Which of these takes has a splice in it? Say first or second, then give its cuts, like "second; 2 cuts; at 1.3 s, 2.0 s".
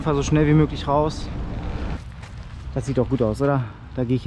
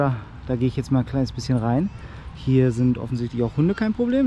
first; 1 cut; at 2.6 s